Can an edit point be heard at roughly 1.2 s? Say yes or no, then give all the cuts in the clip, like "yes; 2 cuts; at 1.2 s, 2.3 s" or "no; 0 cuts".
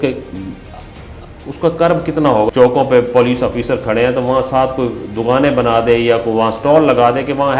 no; 1 cut; at 2.5 s